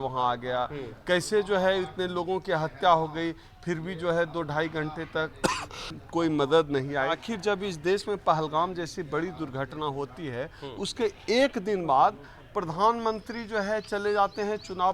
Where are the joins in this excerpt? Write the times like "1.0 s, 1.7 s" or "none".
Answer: 5.8 s, 7.2 s